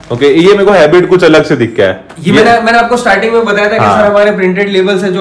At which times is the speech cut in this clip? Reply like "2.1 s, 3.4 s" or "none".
none